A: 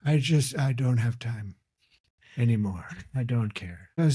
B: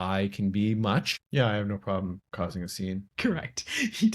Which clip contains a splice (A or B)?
B